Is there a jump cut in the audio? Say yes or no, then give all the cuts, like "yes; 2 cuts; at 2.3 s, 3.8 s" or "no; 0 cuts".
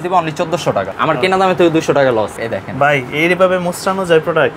yes; 2 cuts; at 0.9 s, 2.3 s